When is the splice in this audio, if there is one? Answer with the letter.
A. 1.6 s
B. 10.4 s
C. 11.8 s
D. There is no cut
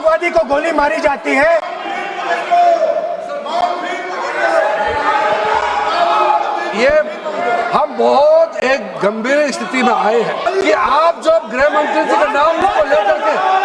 B